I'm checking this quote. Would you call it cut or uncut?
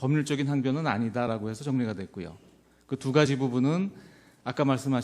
uncut